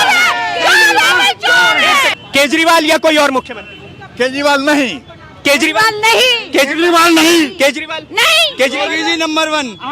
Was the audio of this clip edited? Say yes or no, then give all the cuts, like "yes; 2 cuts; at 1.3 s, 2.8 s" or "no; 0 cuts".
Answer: yes; 1 cut; at 2.2 s